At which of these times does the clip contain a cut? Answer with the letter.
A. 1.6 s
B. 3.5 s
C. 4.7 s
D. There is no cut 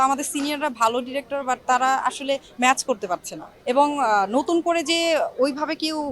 B